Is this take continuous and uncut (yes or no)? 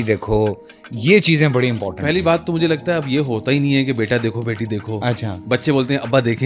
yes